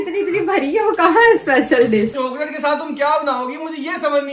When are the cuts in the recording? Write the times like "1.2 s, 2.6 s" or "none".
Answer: 2.1 s